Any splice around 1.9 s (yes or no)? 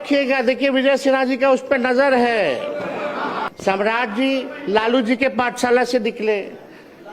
no